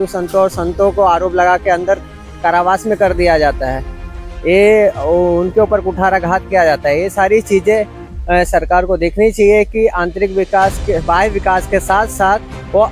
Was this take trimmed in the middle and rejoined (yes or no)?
no